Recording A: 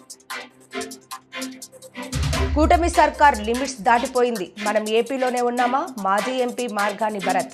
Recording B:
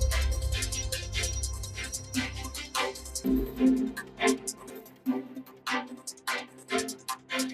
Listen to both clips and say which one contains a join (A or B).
B